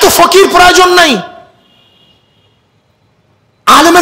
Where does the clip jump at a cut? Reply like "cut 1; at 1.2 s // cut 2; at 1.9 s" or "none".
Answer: none

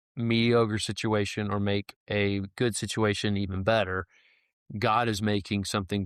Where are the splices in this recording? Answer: none

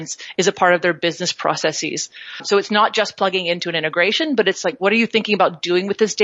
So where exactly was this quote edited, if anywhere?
cut 1; at 2.4 s

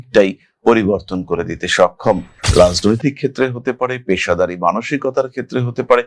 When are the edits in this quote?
cut 1; at 2.3 s

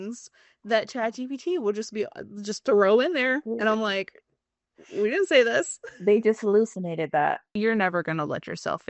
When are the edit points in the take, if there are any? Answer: cut 1; at 7.5 s

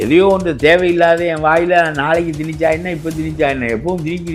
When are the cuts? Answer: none

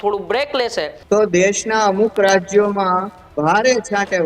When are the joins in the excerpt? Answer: cut 1; at 1.0 s

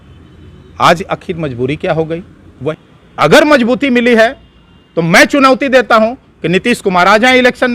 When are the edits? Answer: cut 1; at 2.7 s

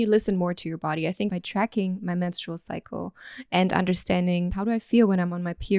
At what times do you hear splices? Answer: cut 1; at 1.3 s // cut 2; at 4.5 s

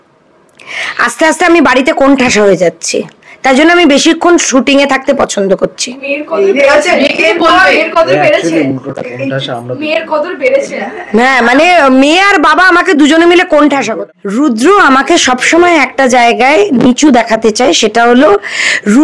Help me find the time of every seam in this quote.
cut 1; at 13.9 s

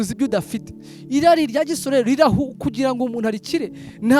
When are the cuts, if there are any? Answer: none

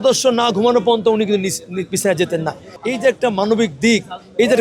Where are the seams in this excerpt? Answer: cut 1; at 2.8 s

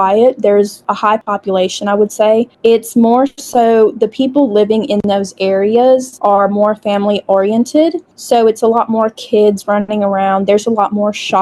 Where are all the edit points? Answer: cut 1; at 1.1 s // cut 2; at 2.5 s // cut 3; at 6.1 s

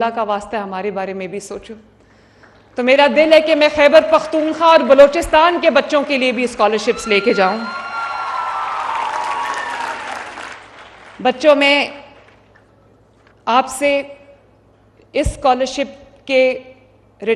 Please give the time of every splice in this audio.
none

